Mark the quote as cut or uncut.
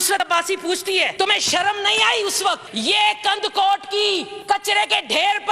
cut